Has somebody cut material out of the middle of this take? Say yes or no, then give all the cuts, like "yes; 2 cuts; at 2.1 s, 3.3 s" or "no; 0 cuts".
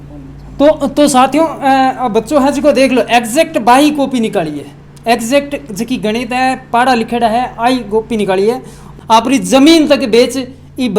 yes; 1 cut; at 8.8 s